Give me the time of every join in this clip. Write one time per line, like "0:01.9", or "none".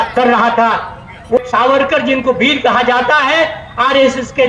0:01.4